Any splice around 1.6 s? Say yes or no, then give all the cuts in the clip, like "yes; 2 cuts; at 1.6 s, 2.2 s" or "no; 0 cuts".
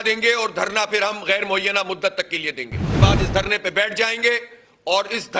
no; 1 cut; at 3.0 s